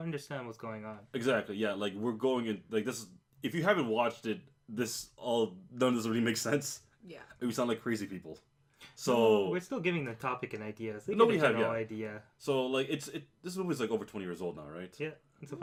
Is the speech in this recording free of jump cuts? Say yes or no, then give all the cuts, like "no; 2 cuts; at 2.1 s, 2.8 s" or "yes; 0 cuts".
yes; 0 cuts